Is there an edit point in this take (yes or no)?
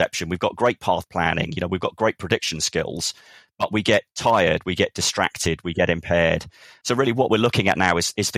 yes